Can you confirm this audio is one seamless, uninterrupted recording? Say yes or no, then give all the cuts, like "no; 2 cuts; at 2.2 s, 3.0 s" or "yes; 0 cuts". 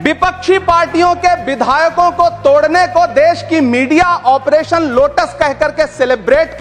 yes; 0 cuts